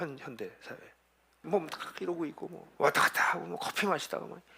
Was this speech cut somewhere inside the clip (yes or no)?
yes